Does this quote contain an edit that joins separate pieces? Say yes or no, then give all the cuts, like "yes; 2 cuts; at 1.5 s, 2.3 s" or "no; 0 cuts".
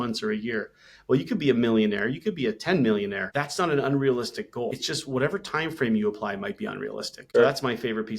yes; 3 cuts; at 3.2 s, 4.8 s, 7.3 s